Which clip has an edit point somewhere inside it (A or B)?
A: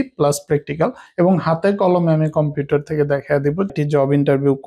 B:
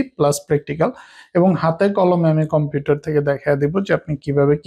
A